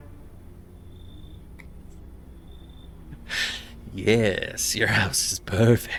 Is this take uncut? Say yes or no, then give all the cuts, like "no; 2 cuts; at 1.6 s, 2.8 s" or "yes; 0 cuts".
yes; 0 cuts